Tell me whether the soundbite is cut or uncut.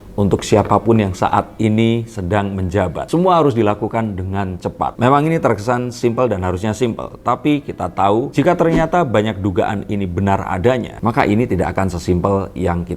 uncut